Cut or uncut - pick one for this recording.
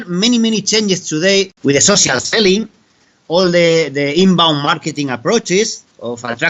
cut